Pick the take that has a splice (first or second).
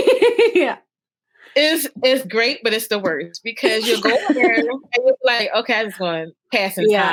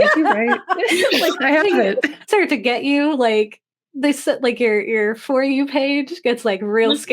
second